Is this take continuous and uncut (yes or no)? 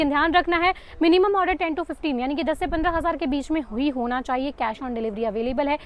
yes